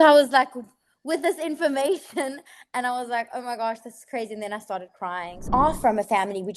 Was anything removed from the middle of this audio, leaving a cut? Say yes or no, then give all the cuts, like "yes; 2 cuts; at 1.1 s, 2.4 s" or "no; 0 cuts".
yes; 1 cut; at 5.4 s